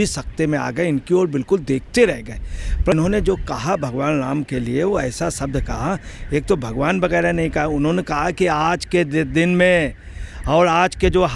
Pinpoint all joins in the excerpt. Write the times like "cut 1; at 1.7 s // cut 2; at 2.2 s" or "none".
cut 1; at 2.9 s